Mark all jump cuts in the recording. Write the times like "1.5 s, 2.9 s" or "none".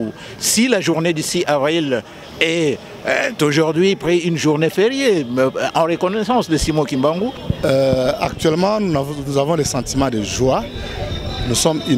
7.4 s